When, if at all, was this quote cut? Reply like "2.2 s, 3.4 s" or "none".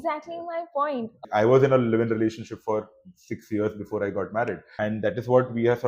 1.2 s, 4.6 s